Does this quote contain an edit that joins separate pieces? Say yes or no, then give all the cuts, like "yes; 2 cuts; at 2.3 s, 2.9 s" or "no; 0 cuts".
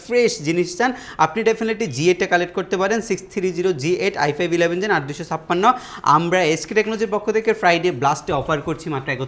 no; 0 cuts